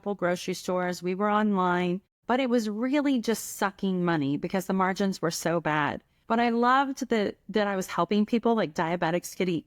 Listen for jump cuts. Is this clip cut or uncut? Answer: cut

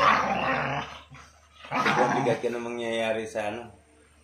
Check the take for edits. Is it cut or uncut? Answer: uncut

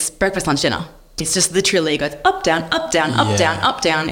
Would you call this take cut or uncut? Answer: uncut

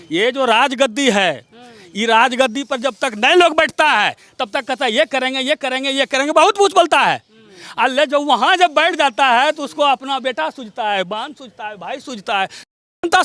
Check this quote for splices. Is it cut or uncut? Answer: uncut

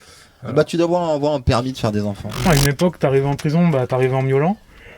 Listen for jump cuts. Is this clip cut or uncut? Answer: cut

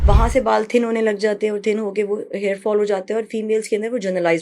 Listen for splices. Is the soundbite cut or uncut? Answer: uncut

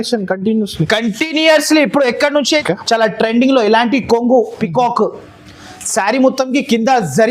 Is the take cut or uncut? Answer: cut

